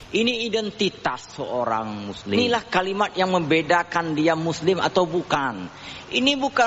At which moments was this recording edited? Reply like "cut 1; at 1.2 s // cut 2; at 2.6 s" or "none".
cut 1; at 2.4 s